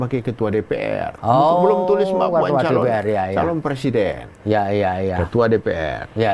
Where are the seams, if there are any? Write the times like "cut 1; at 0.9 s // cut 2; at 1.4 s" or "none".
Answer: none